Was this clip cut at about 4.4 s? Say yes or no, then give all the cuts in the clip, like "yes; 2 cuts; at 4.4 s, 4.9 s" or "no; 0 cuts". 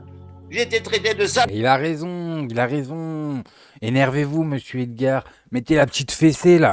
no; 1 cut; at 1.5 s